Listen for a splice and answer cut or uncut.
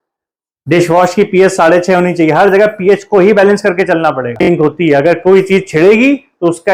cut